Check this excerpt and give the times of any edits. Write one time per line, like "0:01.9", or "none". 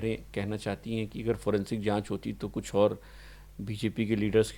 none

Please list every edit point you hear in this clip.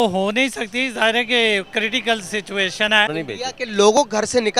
0:03.1

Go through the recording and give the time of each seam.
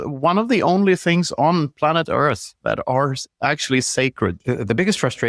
0:04.4

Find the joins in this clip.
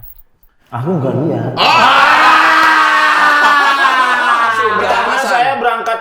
0:04.9

